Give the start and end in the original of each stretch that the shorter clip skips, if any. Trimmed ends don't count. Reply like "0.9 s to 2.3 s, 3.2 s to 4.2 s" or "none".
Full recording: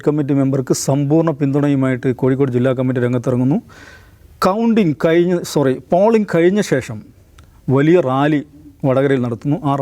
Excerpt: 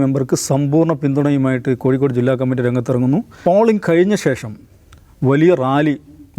3.7 s to 5.8 s